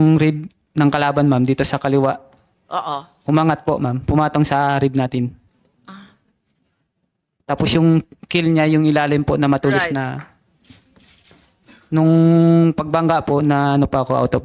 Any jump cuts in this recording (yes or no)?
no